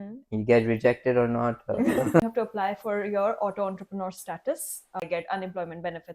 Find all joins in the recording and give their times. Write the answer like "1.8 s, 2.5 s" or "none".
2.3 s, 5.0 s